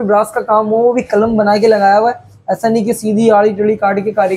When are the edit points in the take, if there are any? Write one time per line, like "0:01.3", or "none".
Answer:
none